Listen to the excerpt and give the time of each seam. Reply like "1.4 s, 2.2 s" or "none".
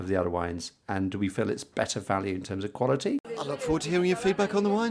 3.3 s